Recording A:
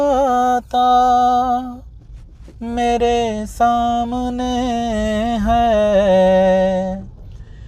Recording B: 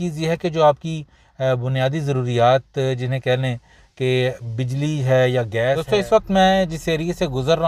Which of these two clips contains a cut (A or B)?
B